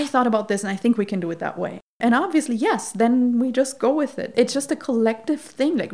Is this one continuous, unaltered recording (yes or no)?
no